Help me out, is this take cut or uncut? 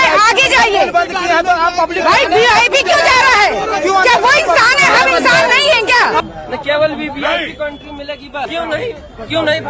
cut